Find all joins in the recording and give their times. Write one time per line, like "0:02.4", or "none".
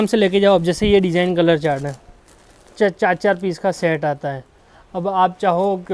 none